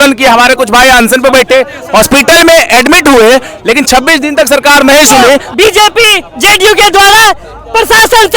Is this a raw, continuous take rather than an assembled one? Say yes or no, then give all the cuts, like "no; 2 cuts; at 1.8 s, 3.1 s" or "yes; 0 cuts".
no; 1 cut; at 5.5 s